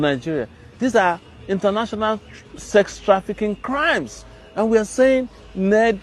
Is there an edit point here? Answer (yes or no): no